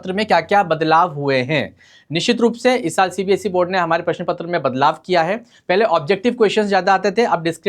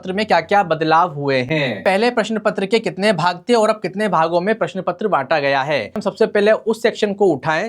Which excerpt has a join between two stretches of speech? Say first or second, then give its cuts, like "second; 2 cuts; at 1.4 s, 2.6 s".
second; 2 cuts; at 1.8 s, 6.0 s